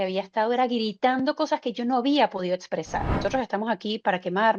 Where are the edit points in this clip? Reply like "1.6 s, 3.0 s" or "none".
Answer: 3.1 s

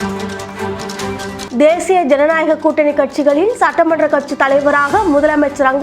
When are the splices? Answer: 1.4 s

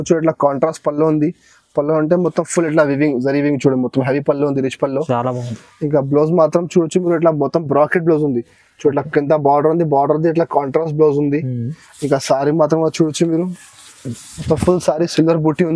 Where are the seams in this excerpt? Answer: none

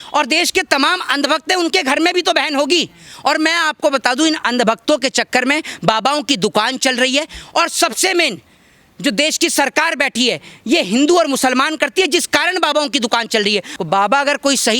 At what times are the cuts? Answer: 13.7 s

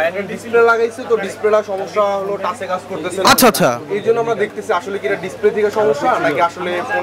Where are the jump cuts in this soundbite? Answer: none

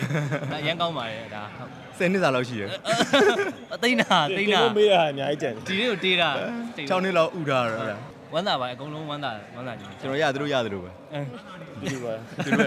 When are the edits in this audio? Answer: none

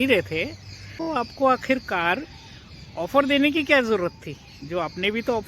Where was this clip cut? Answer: 1.1 s

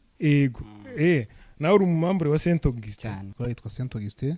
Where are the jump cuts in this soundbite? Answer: 3.3 s

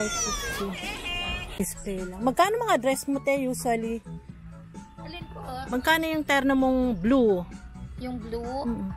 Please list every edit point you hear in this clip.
1.6 s

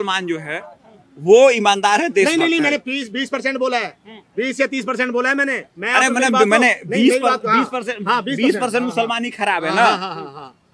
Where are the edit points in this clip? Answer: none

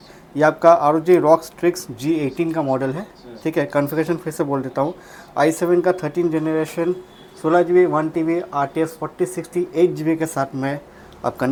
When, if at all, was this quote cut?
none

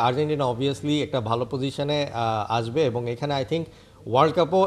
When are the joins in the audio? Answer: none

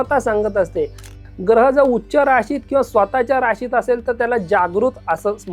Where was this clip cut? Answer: 1.1 s

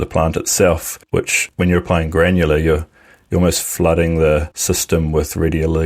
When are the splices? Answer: 1.4 s, 4.5 s

